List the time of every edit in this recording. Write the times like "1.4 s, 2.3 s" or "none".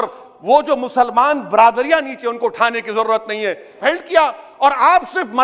3.8 s